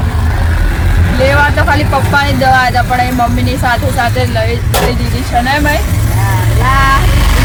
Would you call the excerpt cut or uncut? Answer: uncut